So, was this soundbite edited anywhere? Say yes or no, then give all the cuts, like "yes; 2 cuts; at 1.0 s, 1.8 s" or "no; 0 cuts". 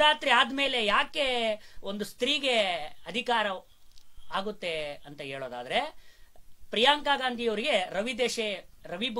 no; 0 cuts